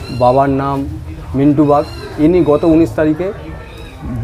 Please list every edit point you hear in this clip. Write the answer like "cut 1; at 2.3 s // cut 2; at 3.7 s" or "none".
cut 1; at 2.0 s

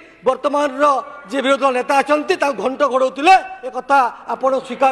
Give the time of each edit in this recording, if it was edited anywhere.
none

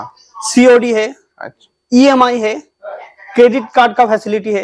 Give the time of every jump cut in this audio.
none

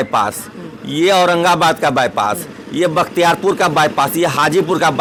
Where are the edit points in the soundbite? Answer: none

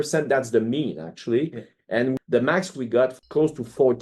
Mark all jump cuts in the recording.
cut 1; at 2.2 s // cut 2; at 3.1 s

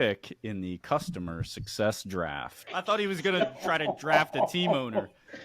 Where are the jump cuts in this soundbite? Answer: cut 1; at 2.7 s

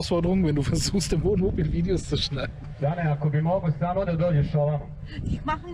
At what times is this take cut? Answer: none

